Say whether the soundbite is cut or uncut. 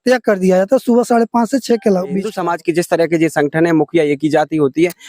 cut